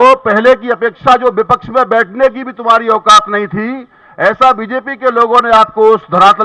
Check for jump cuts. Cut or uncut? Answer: uncut